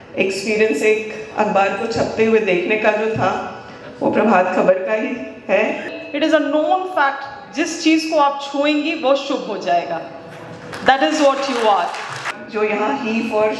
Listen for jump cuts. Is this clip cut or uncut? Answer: cut